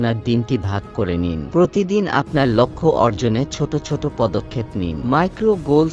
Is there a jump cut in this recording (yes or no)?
yes